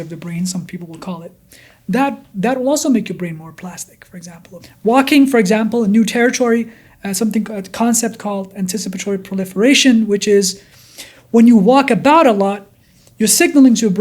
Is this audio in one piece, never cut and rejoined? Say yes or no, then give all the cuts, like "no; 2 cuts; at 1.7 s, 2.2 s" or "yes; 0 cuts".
no; 1 cut; at 4.6 s